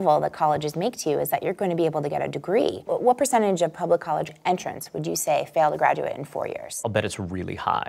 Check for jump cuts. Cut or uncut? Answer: cut